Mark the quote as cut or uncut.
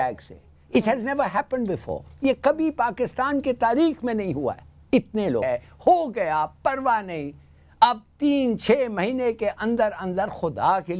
cut